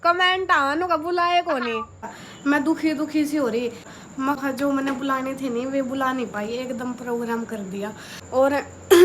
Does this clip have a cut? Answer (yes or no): yes